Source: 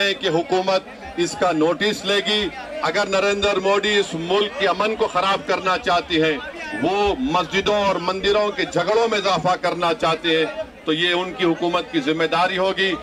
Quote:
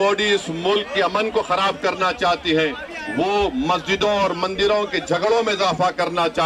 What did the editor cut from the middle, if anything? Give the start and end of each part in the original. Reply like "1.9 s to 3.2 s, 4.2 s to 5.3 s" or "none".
none